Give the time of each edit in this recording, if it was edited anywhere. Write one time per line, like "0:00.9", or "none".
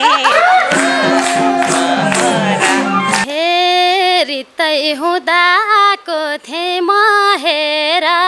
0:03.2